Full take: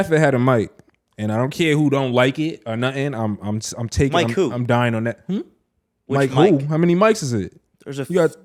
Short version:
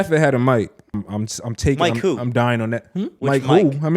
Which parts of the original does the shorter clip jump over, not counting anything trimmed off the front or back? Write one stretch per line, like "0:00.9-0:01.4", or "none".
0:01.0-0:03.3
0:05.5-0:06.0